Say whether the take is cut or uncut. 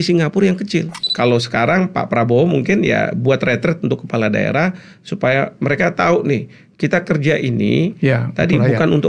cut